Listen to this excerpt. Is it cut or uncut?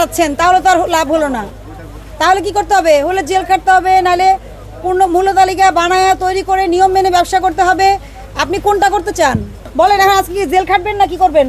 cut